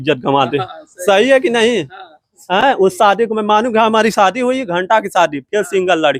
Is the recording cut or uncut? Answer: uncut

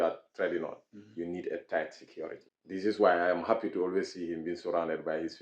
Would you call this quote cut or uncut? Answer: cut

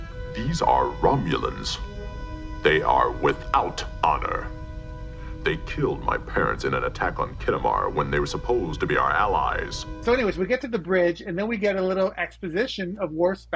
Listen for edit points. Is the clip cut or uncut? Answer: uncut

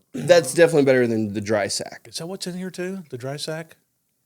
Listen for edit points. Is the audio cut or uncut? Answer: cut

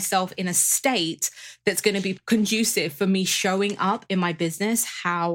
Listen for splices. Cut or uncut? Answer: cut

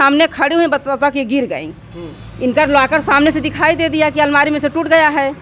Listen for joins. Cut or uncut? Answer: uncut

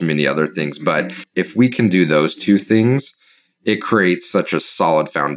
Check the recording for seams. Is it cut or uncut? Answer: cut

